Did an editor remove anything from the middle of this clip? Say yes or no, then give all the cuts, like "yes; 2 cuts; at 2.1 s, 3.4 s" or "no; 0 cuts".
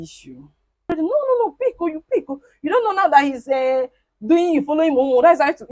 yes; 1 cut; at 0.9 s